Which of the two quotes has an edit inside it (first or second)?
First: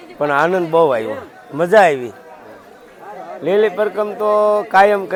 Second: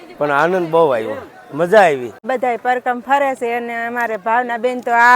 second